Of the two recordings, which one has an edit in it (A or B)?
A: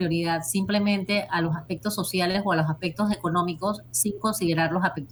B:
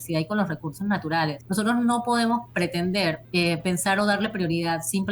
B